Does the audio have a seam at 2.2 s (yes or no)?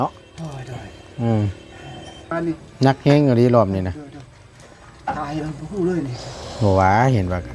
yes